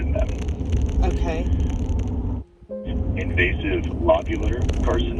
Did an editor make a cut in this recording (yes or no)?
yes